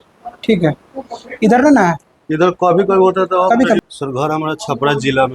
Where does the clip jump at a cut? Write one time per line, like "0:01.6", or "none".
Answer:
0:03.8